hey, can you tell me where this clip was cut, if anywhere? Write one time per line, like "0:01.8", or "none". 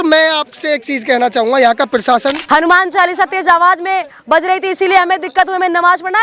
0:02.4